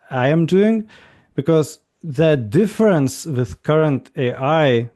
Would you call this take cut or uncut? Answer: uncut